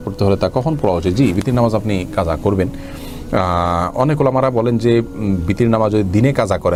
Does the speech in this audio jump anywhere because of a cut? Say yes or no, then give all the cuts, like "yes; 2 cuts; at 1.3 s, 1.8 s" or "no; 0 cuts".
no; 0 cuts